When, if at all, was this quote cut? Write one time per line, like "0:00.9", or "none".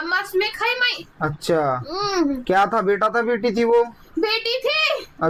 none